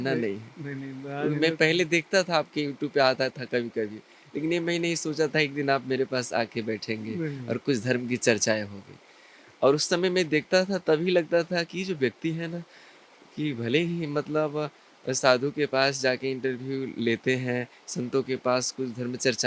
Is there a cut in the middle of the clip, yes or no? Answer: no